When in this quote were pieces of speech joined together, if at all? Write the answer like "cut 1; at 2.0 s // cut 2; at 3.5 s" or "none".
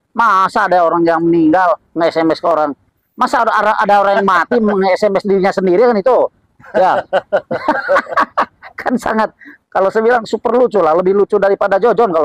none